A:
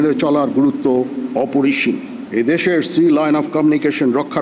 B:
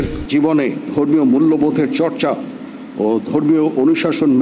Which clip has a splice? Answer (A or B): A